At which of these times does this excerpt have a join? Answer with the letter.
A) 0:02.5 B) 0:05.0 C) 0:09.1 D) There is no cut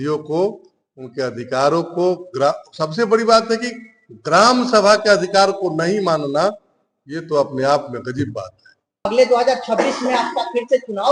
C